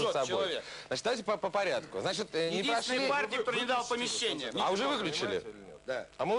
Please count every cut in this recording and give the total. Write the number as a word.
one